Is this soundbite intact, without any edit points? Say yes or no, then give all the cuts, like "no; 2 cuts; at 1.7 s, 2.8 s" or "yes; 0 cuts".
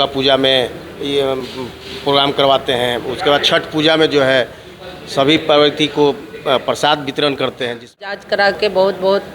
no; 1 cut; at 8.0 s